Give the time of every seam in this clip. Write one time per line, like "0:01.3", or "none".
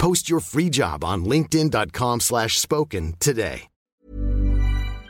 0:04.0